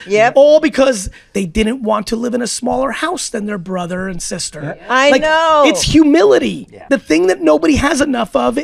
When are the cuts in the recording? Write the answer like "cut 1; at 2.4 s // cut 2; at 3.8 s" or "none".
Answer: cut 1; at 1.1 s // cut 2; at 6.8 s